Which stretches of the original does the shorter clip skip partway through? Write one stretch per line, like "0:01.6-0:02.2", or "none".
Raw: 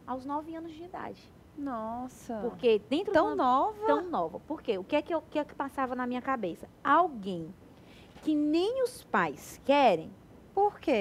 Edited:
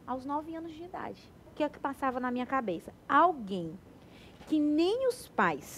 0:01.5-0:05.3